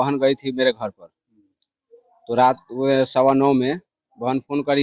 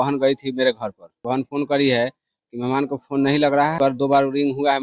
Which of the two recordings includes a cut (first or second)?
second